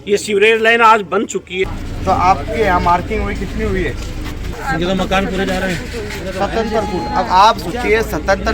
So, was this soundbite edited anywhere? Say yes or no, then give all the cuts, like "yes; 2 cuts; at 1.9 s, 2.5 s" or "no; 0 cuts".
yes; 1 cut; at 1.6 s